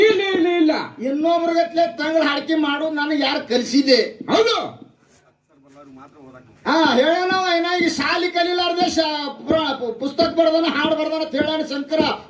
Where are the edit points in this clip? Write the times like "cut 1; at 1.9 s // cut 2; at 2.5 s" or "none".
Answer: none